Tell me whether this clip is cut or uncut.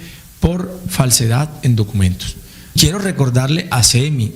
cut